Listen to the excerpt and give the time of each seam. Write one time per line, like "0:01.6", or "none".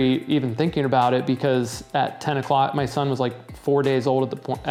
none